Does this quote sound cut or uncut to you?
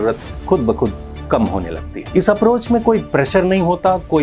uncut